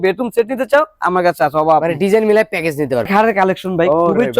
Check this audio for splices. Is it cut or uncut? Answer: cut